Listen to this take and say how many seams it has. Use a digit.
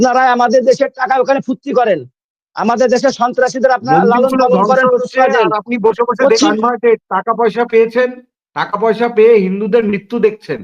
1